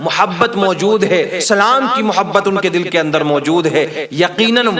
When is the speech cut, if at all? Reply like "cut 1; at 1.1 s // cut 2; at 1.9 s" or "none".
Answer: cut 1; at 1.4 s